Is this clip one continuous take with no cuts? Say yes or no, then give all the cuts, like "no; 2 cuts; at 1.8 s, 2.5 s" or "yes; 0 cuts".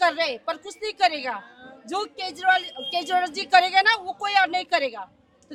yes; 0 cuts